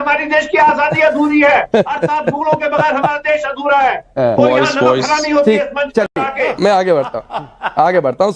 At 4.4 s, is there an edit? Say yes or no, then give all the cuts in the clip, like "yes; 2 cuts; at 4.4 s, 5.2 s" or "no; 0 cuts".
no; 0 cuts